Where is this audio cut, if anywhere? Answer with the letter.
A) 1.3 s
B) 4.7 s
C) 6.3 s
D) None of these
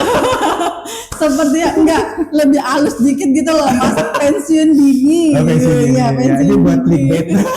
D